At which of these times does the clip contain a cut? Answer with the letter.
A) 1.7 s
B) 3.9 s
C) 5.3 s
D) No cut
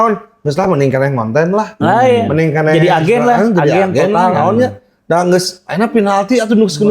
D